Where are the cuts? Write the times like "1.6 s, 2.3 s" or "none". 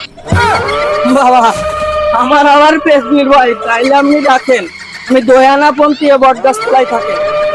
none